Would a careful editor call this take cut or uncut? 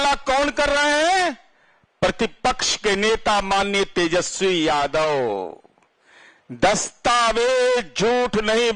uncut